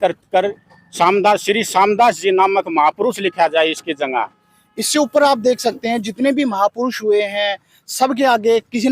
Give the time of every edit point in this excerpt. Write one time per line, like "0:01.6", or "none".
none